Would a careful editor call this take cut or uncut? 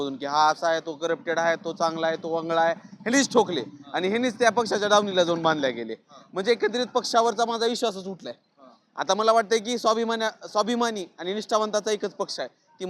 uncut